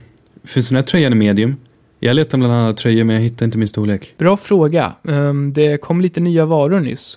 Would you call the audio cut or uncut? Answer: cut